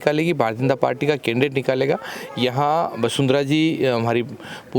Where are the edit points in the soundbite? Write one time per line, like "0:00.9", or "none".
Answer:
none